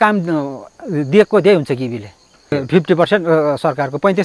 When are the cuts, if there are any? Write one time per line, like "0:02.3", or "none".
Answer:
0:02.5